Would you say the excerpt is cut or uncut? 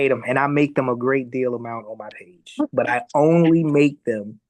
uncut